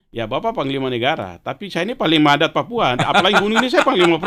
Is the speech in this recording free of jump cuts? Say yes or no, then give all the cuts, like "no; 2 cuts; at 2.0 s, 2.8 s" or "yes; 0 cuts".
yes; 0 cuts